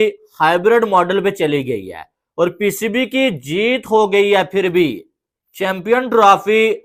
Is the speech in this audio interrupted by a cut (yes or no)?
no